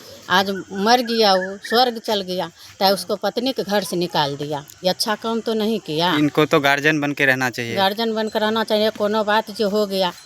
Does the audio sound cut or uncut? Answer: uncut